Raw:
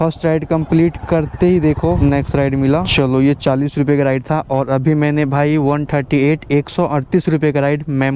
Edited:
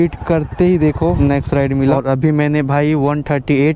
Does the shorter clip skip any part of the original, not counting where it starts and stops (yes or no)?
yes